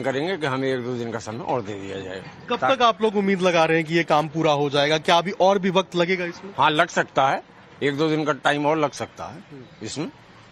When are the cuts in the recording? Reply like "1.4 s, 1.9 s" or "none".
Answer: 6.3 s

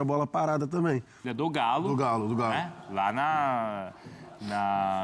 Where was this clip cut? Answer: 1.3 s

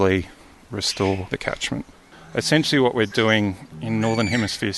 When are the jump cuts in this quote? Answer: 2.0 s

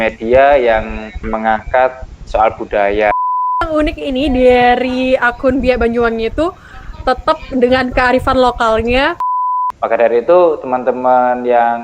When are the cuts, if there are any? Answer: 1.2 s, 3.6 s, 9.3 s

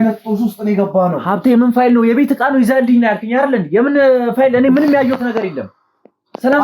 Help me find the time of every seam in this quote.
none

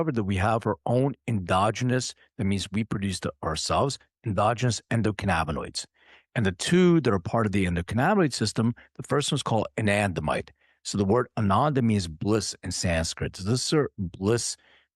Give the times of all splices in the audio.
none

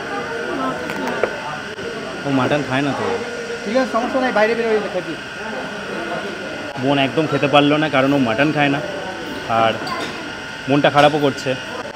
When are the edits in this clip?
none

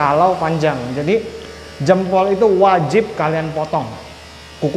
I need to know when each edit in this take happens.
none

